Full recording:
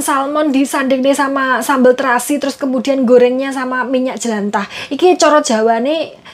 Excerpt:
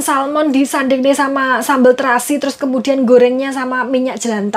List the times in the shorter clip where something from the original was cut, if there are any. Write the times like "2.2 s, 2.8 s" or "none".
none